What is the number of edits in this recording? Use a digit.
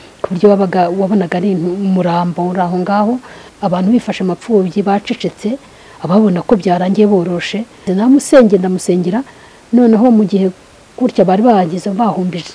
2